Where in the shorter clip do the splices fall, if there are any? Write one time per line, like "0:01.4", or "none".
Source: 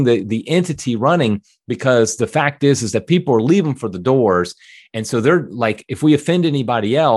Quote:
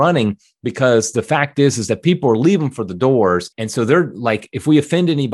0:03.6